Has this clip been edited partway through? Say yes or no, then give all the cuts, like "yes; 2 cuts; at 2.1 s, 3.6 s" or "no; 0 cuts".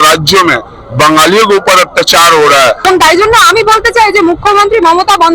yes; 1 cut; at 2.8 s